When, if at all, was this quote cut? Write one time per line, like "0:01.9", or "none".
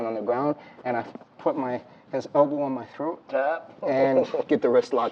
none